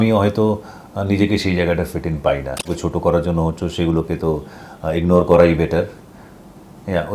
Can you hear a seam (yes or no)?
yes